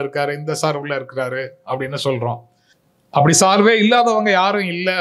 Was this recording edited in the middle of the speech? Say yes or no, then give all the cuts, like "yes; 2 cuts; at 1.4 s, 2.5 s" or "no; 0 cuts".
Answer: no; 0 cuts